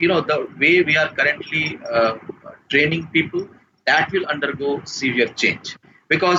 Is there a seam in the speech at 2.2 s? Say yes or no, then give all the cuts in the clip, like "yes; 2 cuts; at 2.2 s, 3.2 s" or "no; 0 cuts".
no; 0 cuts